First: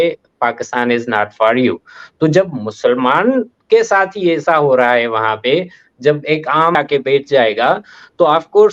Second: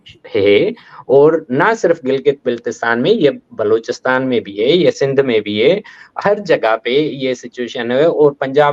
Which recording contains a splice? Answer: first; 1 cut; at 6.8 s

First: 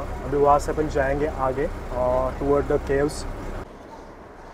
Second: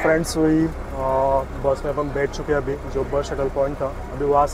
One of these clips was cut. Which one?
first; 1 cut; at 3.6 s

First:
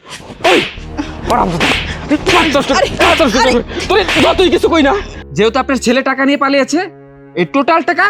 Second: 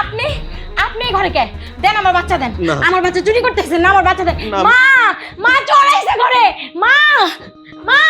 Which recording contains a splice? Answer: first; 1 cut; at 5.2 s

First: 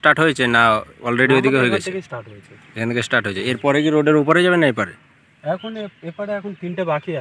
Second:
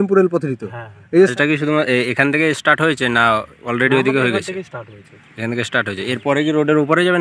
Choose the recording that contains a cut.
second; 1 cut; at 1.3 s

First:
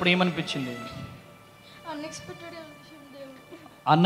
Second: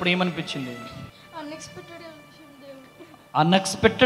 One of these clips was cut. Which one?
second; 1 cut; at 1.2 s

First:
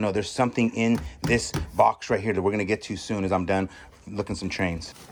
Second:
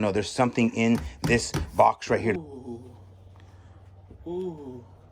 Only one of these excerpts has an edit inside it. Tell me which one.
second; 1 cut; at 2.3 s

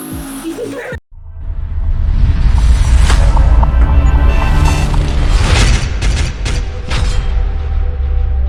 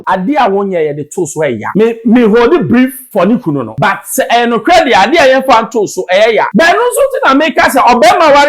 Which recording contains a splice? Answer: second; 4 cuts; at 1.6 s, 3.0 s, 3.7 s, 6.5 s

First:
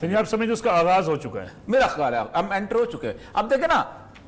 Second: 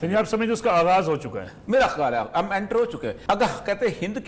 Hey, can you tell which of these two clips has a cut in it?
second; 1 cut; at 3.2 s

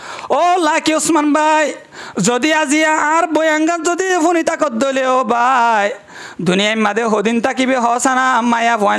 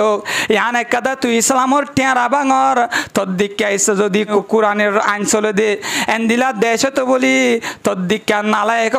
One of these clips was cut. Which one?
second; 1 cut; at 4.3 s

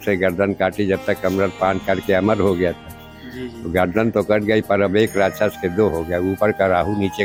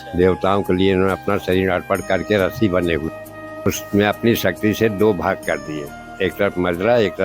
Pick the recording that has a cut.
second; 1 cut; at 3.7 s

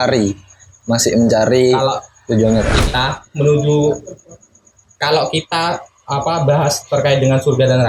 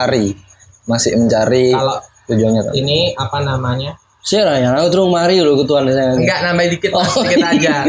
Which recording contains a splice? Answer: first; 1 cut; at 2.8 s

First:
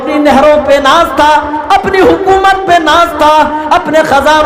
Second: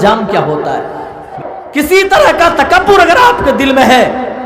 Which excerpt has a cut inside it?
second; 1 cut; at 1.2 s

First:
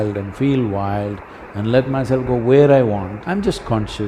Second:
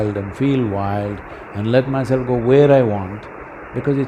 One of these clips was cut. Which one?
first; 1 cut; at 3.1 s

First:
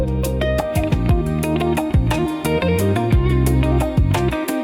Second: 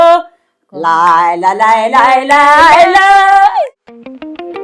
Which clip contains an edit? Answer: second; 1 cut; at 3.6 s

